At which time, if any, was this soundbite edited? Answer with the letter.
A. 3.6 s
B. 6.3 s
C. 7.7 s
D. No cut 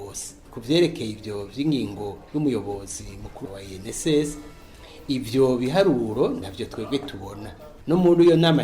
C